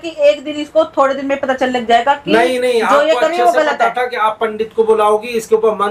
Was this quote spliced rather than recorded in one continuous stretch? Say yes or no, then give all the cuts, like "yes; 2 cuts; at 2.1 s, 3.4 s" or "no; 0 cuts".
no; 0 cuts